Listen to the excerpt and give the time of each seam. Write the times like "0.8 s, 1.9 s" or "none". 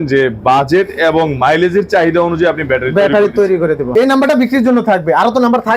3.8 s

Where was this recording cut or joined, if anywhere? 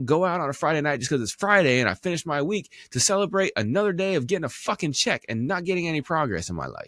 none

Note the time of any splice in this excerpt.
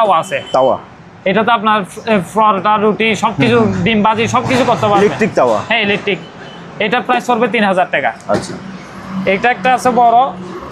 none

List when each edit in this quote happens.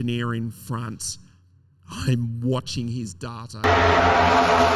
none

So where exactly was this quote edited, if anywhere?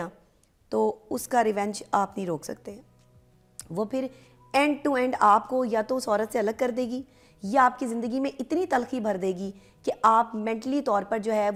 none

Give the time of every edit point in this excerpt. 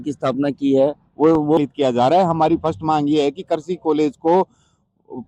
1.6 s

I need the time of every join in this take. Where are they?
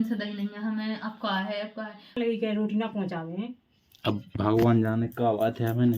2.2 s

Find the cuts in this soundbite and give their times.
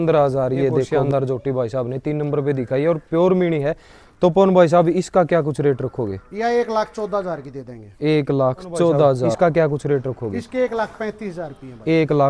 1.0 s, 9.3 s

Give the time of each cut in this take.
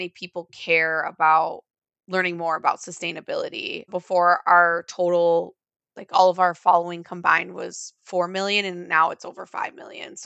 3.9 s

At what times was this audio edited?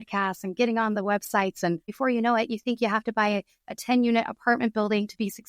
1.9 s

